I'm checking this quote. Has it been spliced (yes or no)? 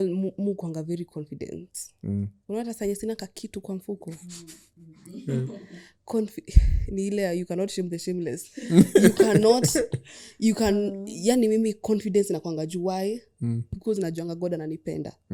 no